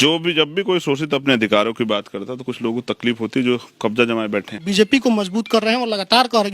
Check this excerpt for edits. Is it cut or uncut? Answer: cut